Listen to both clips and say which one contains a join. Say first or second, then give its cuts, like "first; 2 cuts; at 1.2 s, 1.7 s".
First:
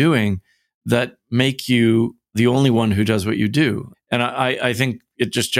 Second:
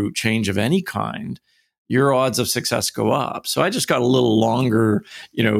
first; 2 cuts; at 2.3 s, 3.9 s